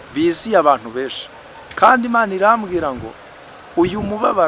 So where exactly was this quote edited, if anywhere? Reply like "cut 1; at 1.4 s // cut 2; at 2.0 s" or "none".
none